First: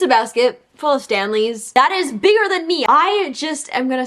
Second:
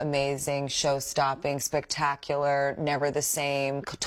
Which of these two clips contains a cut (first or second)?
first